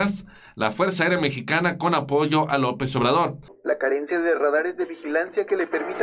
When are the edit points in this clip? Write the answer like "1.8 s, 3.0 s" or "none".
3.5 s